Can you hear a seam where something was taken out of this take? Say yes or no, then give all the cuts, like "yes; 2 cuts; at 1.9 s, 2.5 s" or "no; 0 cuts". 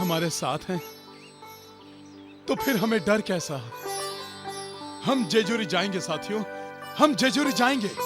yes; 1 cut; at 3.8 s